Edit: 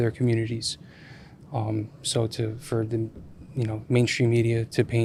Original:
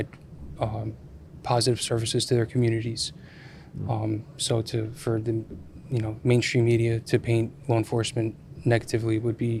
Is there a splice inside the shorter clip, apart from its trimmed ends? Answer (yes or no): no